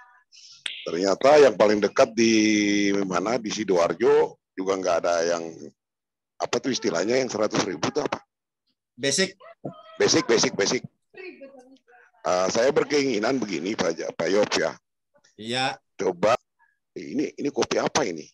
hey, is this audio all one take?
no; 1 cut; at 16.3 s

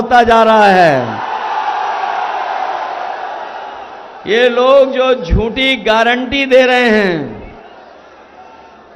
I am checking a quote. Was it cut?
no; 0 cuts

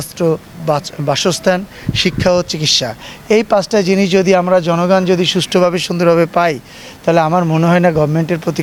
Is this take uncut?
yes; 0 cuts

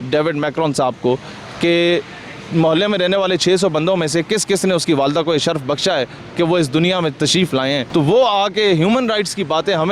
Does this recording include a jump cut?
no; 0 cuts

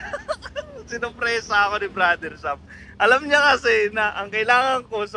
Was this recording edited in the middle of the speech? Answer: no; 0 cuts

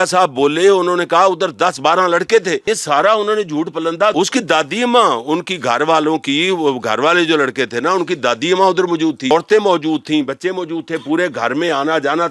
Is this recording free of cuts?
no; 3 cuts; at 2.6 s, 4.1 s, 9.3 s

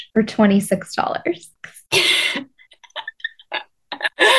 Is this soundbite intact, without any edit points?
no; 1 cut; at 1.5 s

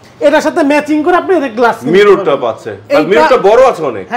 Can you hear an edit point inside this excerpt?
no; 0 cuts

